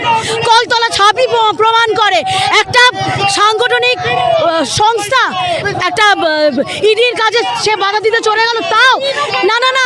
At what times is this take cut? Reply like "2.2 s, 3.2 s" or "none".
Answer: none